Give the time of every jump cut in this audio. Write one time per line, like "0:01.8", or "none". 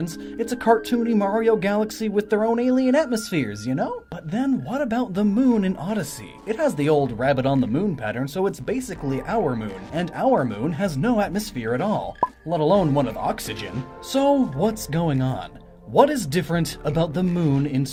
none